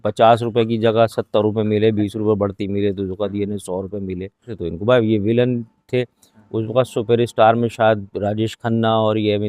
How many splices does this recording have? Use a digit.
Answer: 1